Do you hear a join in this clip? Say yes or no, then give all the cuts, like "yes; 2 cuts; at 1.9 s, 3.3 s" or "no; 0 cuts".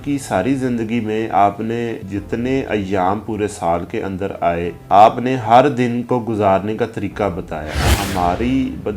yes; 3 cuts; at 2.0 s, 4.8 s, 7.8 s